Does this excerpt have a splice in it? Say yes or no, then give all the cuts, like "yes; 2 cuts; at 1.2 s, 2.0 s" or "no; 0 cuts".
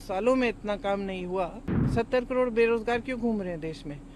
no; 0 cuts